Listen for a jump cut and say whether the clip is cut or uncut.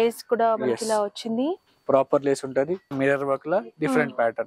cut